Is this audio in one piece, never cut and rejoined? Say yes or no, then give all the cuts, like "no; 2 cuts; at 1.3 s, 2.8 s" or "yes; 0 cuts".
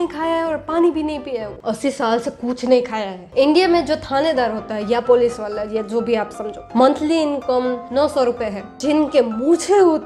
no; 4 cuts; at 1.5 s, 3.3 s, 6.6 s, 8.8 s